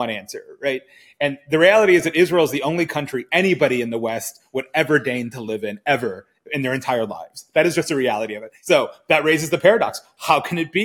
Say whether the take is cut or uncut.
uncut